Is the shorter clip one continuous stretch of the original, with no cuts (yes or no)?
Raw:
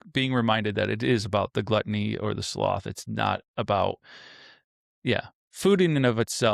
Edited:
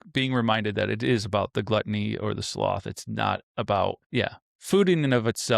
no